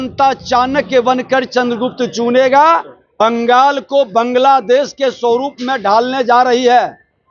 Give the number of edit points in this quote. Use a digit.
1